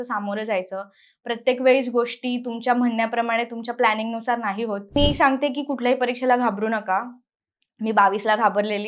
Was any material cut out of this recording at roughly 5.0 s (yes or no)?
yes